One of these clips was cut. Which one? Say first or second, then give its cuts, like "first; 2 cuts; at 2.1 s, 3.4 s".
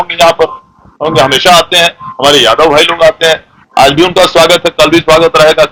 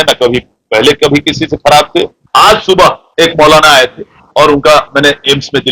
second; 1 cut; at 2.2 s